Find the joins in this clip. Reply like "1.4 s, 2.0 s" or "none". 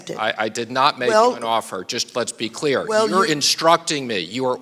none

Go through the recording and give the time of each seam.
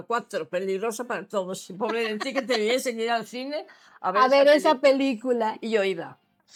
none

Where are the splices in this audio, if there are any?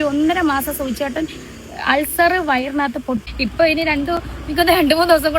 3.3 s

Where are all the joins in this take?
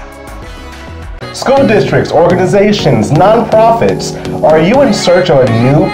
1.3 s

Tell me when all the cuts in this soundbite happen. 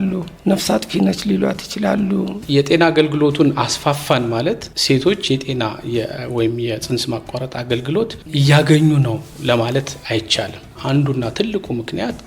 2.4 s, 10.7 s

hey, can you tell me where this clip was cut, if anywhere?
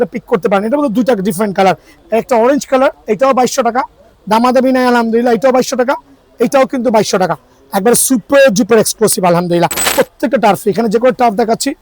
1.9 s, 9.9 s

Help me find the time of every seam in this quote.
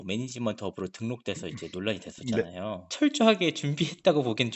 2.8 s

